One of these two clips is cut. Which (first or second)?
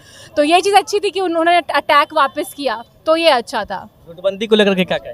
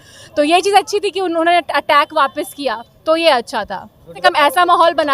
second